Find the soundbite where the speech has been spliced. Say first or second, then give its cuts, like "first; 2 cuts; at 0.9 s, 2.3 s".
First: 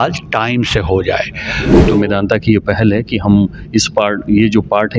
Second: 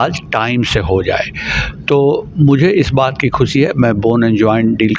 first; 1 cut; at 1.7 s